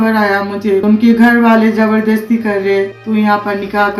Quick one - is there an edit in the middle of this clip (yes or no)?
yes